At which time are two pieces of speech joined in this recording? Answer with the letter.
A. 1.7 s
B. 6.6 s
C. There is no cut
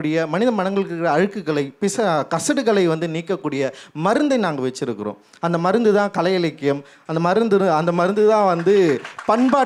C